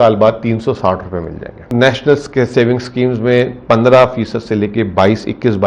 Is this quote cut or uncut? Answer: cut